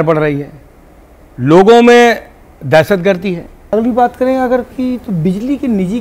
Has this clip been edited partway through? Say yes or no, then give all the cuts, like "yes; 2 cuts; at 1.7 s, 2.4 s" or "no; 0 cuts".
yes; 1 cut; at 3.5 s